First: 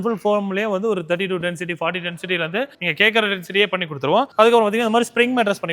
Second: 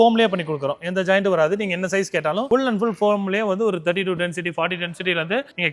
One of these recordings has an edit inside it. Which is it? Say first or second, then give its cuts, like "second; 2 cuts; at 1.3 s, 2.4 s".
first; 1 cut; at 4.3 s